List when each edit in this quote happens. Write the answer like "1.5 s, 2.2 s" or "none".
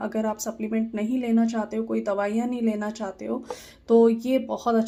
none